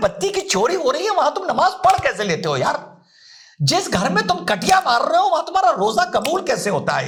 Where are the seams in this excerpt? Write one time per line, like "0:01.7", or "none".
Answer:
none